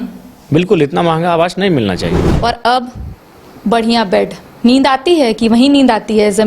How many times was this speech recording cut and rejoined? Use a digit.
1